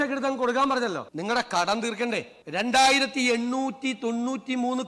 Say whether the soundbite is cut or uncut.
cut